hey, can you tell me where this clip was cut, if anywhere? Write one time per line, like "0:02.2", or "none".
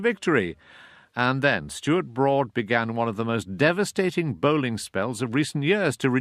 0:03.0